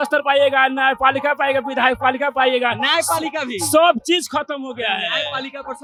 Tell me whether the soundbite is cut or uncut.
uncut